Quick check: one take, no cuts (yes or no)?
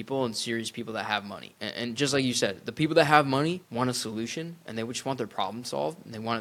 no